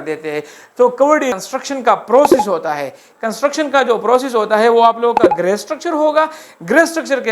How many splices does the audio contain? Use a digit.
1